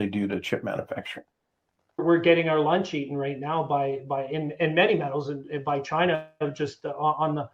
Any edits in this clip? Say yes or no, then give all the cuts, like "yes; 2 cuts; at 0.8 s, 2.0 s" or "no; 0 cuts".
yes; 1 cut; at 2.0 s